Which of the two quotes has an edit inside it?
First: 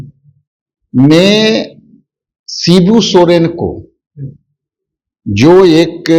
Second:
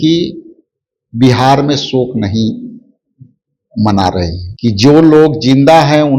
second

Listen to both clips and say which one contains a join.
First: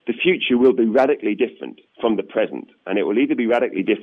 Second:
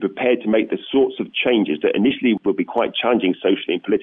second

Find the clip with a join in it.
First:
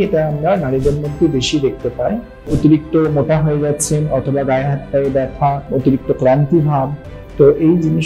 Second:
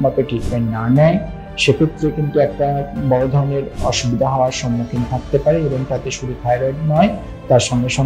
first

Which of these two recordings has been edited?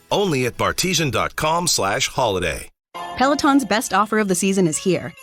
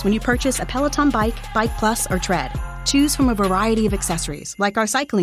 first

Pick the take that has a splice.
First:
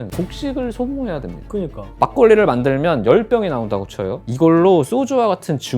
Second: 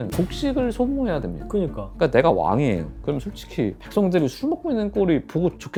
first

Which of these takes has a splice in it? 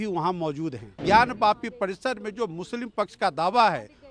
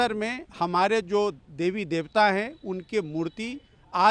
first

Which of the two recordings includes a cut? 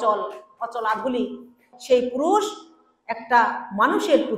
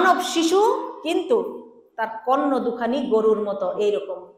first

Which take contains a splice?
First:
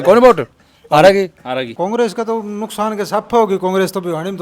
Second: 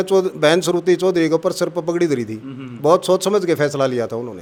first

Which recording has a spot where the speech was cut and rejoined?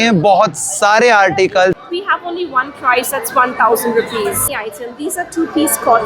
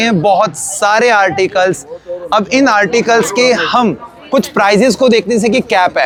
first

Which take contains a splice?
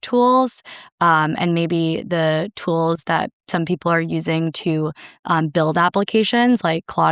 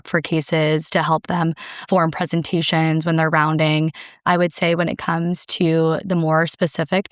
second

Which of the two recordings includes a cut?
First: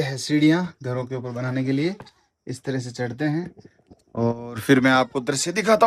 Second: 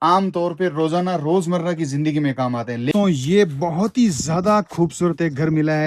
second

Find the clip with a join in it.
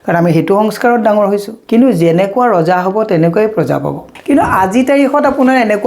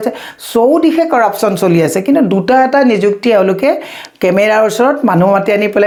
first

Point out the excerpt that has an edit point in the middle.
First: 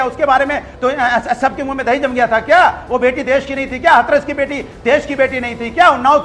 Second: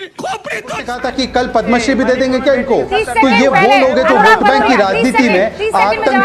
second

